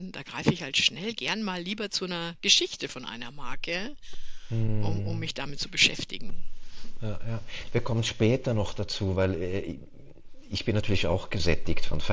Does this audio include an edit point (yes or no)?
yes